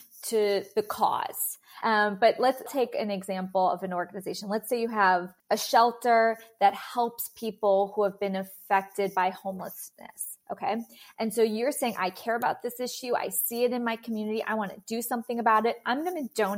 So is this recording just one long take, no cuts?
no; 3 cuts; at 1.8 s, 2.7 s, 5.3 s

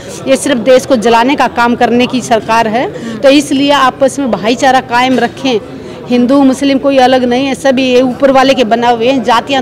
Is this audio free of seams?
yes; 0 cuts

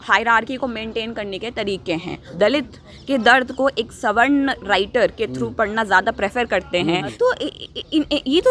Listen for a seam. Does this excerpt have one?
yes; 2 cuts; at 2.2 s, 7.1 s

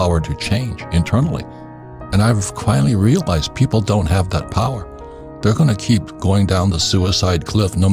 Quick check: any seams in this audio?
no; 0 cuts

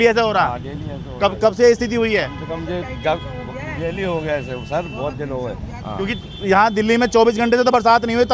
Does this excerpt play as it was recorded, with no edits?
yes; 0 cuts

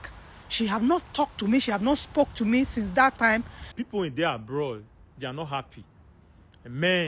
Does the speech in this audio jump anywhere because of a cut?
yes; 1 cut; at 3.8 s

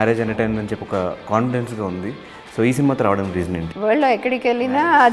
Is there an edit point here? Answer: yes; 1 cut; at 3.6 s

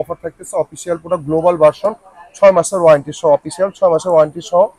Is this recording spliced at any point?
no; 0 cuts

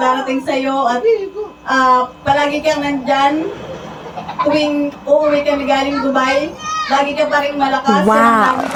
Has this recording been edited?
no; 0 cuts

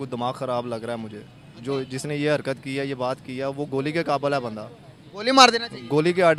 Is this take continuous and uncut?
yes; 0 cuts

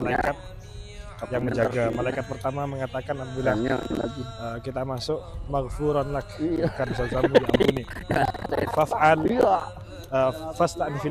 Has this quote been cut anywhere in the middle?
no; 0 cuts

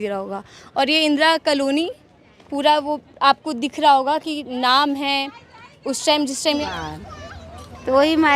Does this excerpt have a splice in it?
yes; 1 cut; at 6.6 s

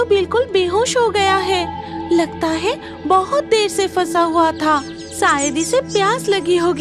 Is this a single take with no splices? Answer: yes; 0 cuts

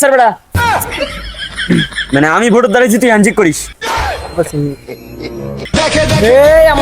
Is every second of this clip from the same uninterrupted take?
no; 1 cut; at 5.7 s

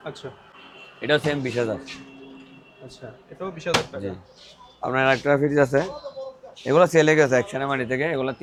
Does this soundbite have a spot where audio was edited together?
no; 0 cuts

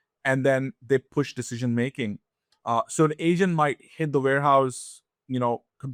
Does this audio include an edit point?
no; 0 cuts

